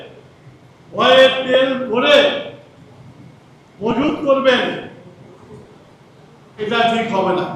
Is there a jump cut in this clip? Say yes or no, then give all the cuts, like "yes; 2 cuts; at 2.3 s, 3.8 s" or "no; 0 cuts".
no; 0 cuts